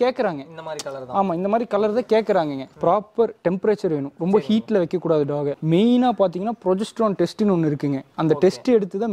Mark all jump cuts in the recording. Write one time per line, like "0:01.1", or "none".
0:02.7
0:05.6
0:08.1